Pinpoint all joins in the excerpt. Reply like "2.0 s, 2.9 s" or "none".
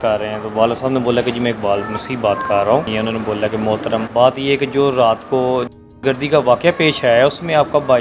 2.9 s, 4.1 s